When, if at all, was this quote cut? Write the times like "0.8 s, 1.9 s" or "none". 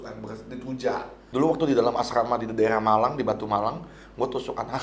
1.1 s